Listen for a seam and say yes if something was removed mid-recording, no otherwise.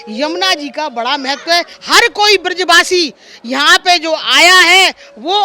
yes